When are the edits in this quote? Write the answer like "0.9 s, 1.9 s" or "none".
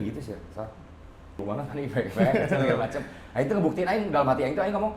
1.4 s